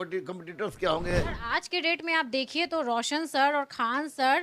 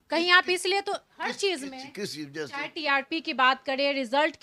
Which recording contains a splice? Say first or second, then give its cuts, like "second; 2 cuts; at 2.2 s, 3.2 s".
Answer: first; 1 cut; at 1.1 s